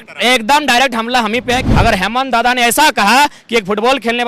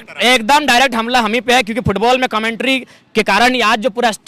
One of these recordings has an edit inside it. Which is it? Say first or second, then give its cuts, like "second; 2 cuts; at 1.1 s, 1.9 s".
first; 1 cut; at 1.7 s